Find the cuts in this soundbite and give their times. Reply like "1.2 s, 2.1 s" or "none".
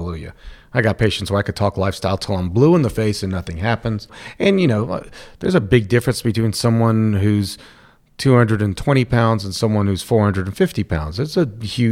4.2 s